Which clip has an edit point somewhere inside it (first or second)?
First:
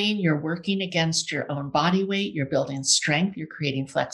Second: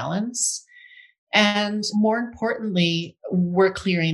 second